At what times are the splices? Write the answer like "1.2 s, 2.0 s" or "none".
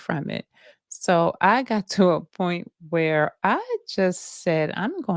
none